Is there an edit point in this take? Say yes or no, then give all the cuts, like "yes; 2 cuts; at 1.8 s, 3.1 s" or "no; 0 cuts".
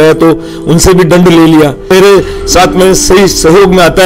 yes; 1 cut; at 1.8 s